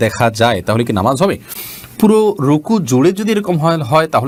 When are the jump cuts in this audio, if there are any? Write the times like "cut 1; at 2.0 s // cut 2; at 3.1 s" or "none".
none